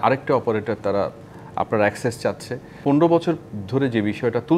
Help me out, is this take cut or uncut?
cut